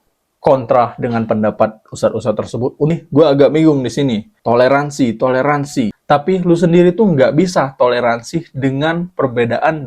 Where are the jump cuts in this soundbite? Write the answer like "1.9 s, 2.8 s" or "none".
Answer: 2.9 s, 4.3 s